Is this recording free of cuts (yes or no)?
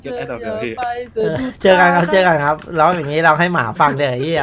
yes